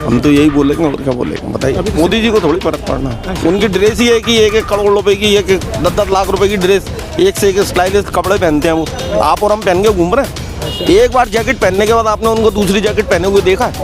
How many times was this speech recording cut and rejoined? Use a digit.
1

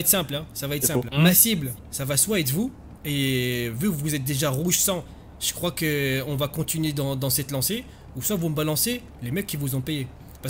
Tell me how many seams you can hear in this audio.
1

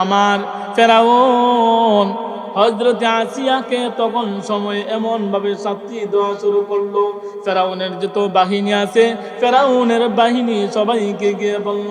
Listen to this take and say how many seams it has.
1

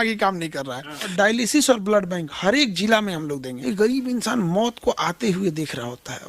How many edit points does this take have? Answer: 2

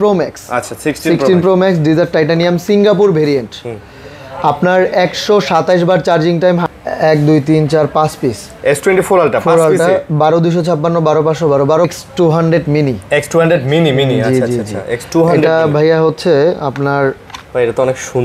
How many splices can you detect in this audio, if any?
2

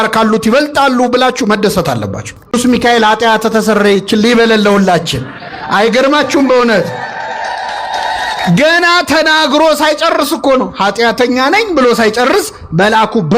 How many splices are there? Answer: 1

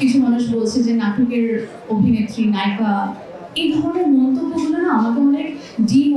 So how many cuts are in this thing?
0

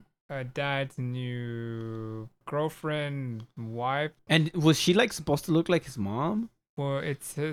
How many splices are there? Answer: 2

